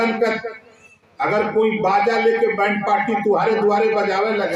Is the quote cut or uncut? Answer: uncut